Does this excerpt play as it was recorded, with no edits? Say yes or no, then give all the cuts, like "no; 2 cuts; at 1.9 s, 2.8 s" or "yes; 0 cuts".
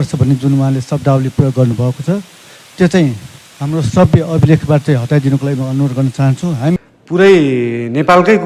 no; 1 cut; at 6.8 s